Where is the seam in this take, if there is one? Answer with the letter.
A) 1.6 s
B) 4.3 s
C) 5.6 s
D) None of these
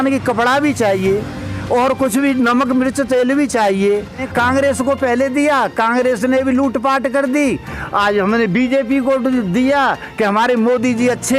B